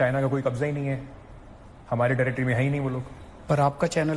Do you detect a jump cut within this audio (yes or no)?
no